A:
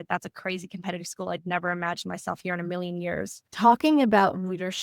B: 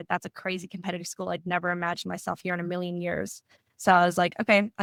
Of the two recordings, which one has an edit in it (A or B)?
A